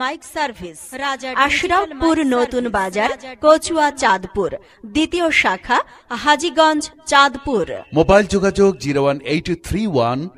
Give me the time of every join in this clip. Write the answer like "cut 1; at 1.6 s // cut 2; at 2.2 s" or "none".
cut 1; at 1.1 s